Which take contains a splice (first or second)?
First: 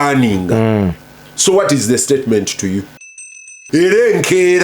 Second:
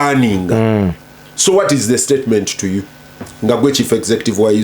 first